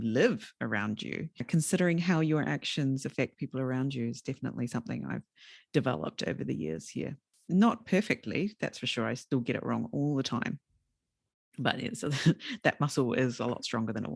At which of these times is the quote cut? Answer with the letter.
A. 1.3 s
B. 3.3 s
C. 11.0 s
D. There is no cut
A